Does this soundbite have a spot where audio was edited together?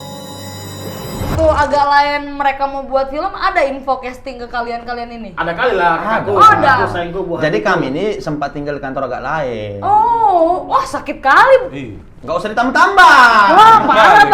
yes; 1 cut; at 1.3 s

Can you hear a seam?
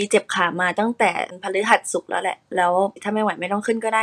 yes; 2 cuts; at 1.3 s, 3.0 s

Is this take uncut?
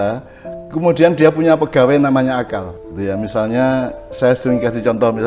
no; 1 cut; at 2.8 s

